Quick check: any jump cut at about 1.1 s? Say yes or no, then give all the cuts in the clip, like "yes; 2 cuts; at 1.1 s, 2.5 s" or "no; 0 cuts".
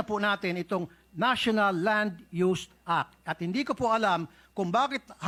no; 0 cuts